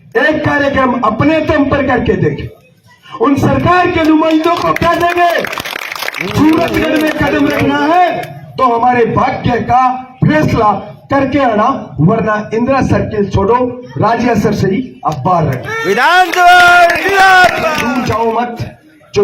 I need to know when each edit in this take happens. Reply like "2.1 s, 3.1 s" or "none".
17.8 s